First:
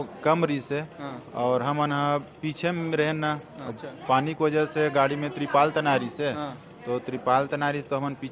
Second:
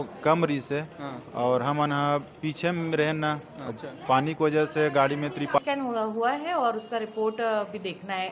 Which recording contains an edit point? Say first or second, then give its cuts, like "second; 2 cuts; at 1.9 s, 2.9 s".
second; 1 cut; at 5.6 s